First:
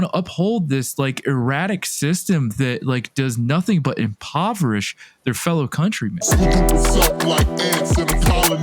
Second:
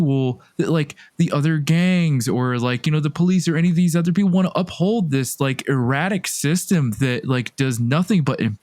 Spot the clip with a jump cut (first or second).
first